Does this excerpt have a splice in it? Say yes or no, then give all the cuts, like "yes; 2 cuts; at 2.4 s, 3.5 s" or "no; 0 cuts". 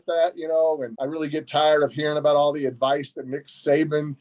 yes; 1 cut; at 1.0 s